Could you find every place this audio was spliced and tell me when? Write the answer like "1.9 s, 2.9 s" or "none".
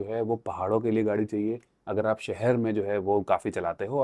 none